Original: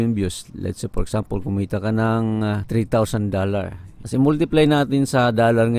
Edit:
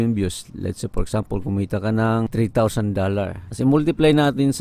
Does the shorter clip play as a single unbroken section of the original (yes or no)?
no